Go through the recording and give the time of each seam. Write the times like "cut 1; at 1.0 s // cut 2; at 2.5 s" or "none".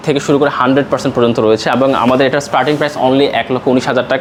none